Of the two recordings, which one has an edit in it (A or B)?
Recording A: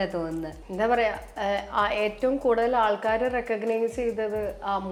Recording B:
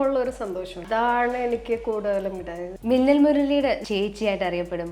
B